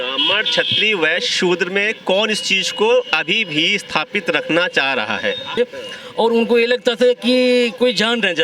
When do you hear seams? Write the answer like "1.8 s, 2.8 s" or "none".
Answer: 5.6 s